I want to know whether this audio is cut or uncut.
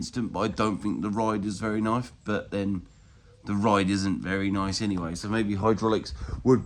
uncut